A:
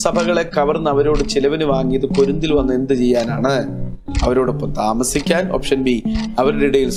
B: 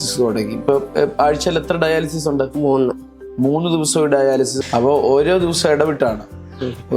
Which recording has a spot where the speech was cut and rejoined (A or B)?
B